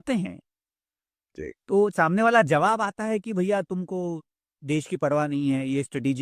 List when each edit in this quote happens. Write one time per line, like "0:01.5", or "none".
none